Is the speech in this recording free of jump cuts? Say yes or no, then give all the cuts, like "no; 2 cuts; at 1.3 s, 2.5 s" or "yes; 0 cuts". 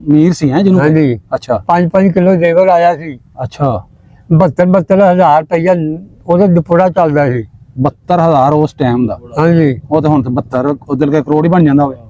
yes; 0 cuts